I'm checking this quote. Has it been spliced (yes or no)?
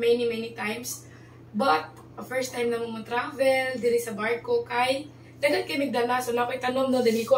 no